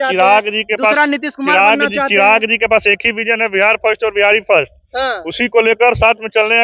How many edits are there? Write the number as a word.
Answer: zero